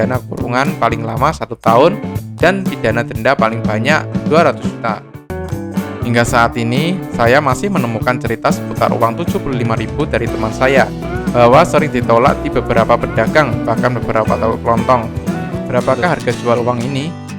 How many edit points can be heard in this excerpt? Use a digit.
2